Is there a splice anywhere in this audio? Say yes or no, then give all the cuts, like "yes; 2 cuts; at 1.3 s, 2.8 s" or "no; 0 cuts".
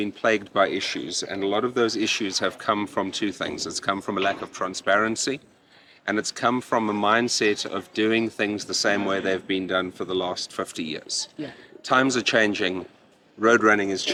no; 0 cuts